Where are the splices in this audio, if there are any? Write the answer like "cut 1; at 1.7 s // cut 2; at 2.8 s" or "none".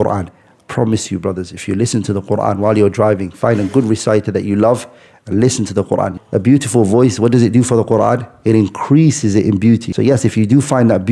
cut 1; at 6.1 s // cut 2; at 9.9 s